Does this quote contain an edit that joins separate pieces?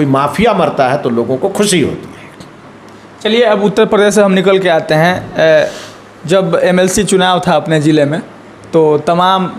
no; 0 cuts

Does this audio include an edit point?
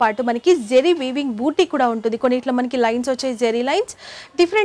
no; 0 cuts

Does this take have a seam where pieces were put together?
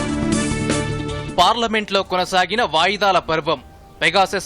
yes; 1 cut; at 0.9 s

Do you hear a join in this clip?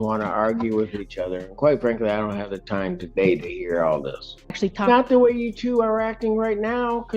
yes; 1 cut; at 4.5 s

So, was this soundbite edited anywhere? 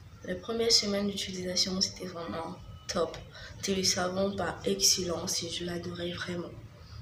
no; 0 cuts

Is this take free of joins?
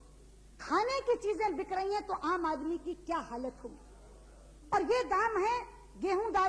yes; 0 cuts

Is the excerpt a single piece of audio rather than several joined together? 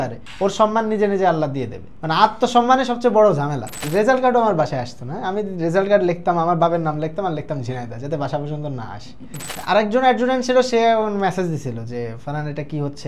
no; 2 cuts; at 3.8 s, 9.4 s

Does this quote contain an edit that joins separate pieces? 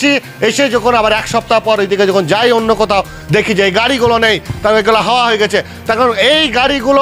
no; 0 cuts

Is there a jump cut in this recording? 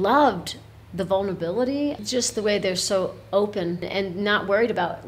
yes; 2 cuts; at 2.0 s, 3.9 s

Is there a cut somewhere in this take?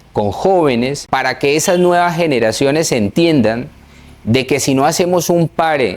yes; 1 cut; at 1.0 s

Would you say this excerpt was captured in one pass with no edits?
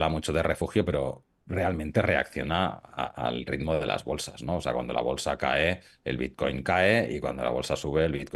yes; 0 cuts

